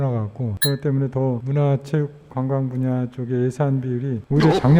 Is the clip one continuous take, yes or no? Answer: yes